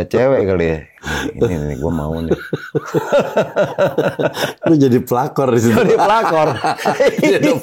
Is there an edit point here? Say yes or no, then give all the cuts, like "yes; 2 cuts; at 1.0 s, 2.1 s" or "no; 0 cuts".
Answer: no; 0 cuts